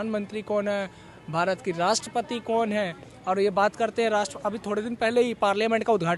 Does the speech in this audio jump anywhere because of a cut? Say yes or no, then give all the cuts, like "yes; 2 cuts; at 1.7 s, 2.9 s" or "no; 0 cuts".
no; 0 cuts